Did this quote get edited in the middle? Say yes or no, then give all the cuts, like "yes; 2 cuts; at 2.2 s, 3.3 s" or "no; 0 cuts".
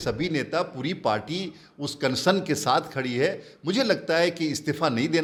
no; 0 cuts